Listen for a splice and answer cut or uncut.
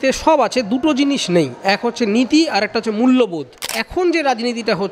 cut